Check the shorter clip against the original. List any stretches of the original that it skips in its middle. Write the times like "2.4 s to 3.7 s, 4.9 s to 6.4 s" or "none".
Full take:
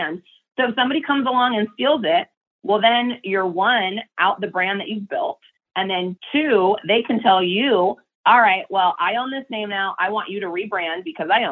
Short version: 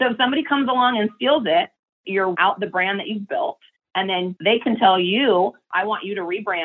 2.6 s to 3.9 s, 6.2 s to 6.8 s, 8.1 s to 9.9 s